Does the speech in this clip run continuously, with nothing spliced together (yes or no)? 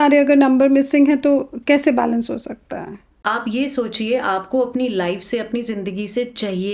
no